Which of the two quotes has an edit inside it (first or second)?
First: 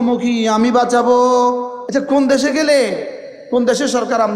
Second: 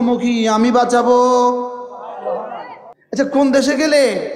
first